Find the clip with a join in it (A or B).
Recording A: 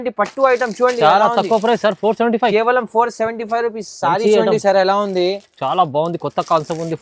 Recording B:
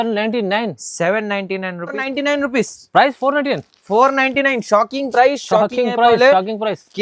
B